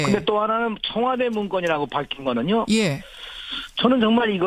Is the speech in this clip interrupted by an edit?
no; 0 cuts

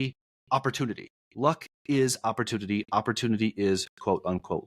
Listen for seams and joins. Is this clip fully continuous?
yes; 0 cuts

